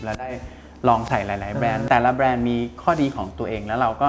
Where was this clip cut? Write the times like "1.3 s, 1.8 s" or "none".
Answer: 1.8 s